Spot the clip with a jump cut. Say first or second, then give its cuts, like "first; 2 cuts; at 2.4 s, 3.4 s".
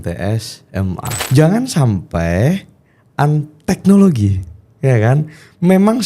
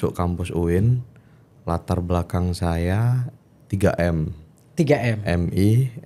first; 1 cut; at 1.2 s